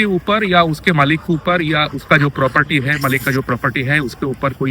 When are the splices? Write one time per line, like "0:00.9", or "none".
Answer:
none